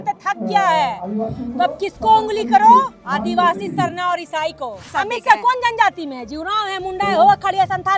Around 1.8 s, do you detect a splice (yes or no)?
no